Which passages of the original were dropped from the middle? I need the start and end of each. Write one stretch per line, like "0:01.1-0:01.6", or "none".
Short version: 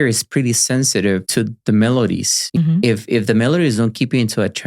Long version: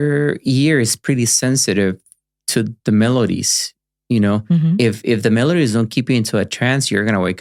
0:02.0-0:02.5
0:03.8-0:04.5